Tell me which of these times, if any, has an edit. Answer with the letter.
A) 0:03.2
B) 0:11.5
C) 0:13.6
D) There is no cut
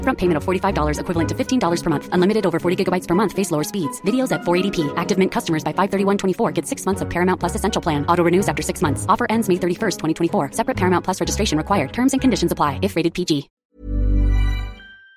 C